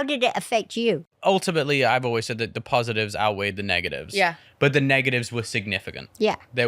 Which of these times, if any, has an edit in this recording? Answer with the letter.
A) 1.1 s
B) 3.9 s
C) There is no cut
A